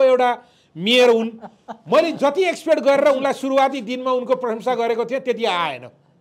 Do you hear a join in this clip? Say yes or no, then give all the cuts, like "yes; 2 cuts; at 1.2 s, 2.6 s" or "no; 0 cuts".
no; 0 cuts